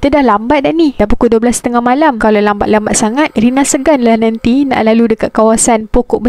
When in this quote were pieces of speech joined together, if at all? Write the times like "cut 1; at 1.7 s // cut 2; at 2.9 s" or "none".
none